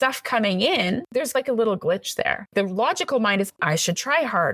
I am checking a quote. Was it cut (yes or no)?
yes